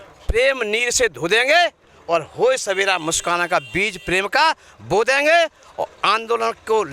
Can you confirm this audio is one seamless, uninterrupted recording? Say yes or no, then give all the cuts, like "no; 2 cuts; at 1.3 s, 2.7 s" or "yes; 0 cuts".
yes; 0 cuts